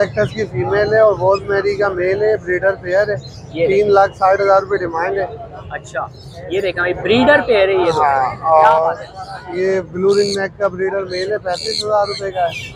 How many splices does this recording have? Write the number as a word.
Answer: zero